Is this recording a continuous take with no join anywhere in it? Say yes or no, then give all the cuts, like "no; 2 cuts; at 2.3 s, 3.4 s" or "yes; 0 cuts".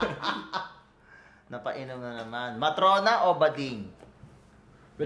yes; 0 cuts